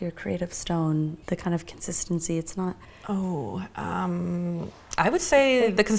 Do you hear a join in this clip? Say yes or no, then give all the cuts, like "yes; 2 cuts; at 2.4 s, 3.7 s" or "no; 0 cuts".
yes; 1 cut; at 1.2 s